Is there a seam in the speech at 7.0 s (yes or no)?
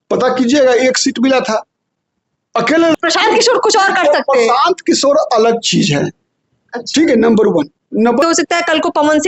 no